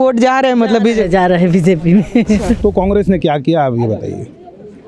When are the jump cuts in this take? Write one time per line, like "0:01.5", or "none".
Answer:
0:02.6